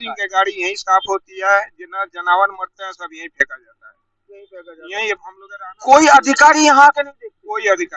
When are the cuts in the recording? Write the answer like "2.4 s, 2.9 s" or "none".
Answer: none